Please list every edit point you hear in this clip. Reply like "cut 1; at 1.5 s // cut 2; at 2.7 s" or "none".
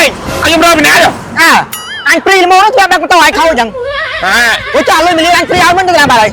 none